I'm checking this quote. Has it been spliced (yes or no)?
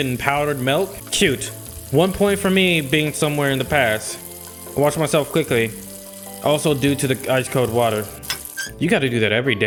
no